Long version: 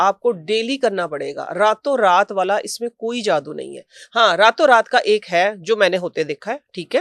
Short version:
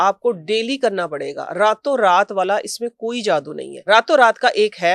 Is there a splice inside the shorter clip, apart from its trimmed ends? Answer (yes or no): yes